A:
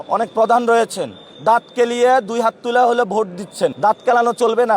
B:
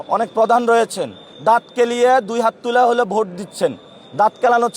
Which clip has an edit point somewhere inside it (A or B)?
A